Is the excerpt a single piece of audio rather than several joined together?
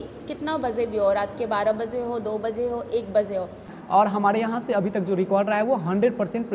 no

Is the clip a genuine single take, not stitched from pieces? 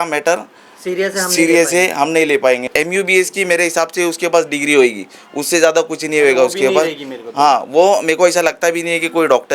no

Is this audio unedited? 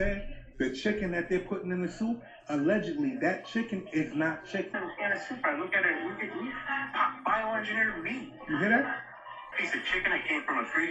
no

